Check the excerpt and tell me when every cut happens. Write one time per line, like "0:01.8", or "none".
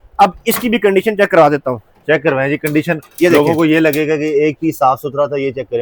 none